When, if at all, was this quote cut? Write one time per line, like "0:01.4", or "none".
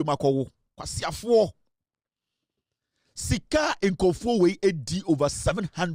none